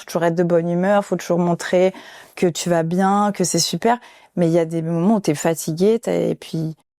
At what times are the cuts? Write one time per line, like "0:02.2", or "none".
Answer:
none